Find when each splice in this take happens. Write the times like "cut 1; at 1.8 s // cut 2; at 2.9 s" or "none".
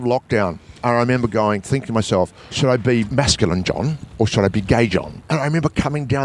cut 1; at 2.4 s // cut 2; at 3.1 s // cut 3; at 5.1 s